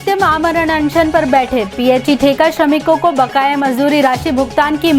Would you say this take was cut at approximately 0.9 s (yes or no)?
no